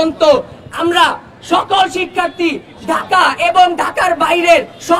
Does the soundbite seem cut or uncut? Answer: uncut